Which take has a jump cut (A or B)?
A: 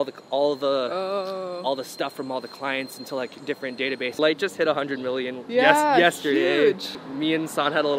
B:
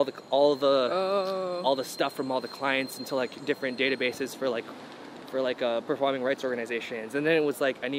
A